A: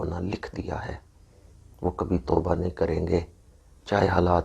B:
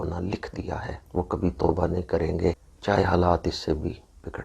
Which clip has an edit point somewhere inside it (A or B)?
B